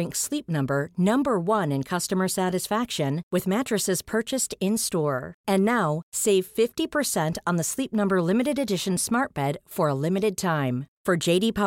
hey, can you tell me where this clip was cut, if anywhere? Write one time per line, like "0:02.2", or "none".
none